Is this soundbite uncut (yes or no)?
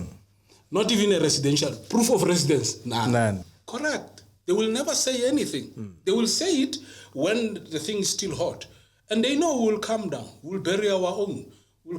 no